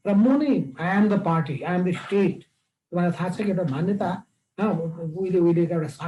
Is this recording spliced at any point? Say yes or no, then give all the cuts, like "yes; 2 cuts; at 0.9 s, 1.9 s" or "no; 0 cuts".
no; 0 cuts